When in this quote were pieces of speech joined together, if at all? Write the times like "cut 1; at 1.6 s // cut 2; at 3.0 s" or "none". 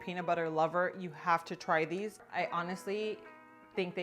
cut 1; at 2.2 s